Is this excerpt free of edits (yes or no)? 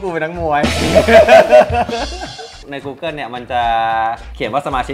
no